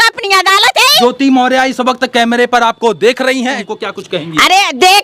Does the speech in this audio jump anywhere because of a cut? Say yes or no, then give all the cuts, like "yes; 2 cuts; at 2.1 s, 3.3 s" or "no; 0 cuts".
yes; 2 cuts; at 1.0 s, 3.6 s